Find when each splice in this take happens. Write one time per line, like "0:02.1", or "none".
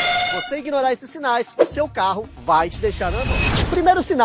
none